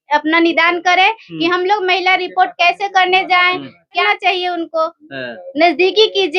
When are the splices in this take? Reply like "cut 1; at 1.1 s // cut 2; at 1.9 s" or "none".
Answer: cut 1; at 4.0 s